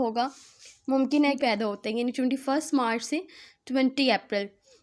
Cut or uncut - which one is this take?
cut